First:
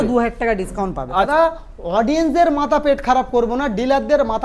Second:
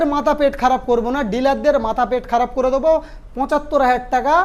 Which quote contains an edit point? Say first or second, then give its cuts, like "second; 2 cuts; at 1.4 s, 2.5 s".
first; 1 cut; at 1.3 s